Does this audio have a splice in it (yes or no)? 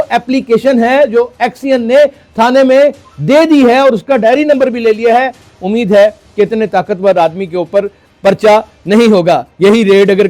no